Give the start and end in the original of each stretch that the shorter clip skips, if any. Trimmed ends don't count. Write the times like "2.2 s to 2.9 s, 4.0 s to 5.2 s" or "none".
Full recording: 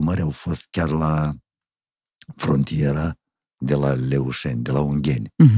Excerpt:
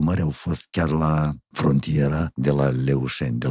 1.4 s to 2.3 s, 3.2 s to 3.6 s